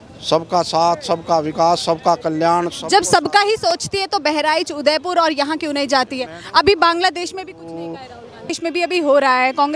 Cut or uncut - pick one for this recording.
cut